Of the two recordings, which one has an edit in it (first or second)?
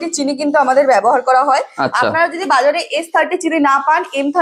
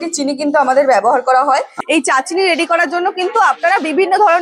second